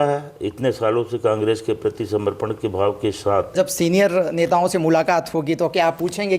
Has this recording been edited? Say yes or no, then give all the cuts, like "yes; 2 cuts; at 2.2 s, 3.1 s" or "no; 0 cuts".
yes; 1 cut; at 3.5 s